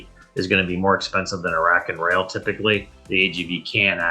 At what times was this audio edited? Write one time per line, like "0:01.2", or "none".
0:02.9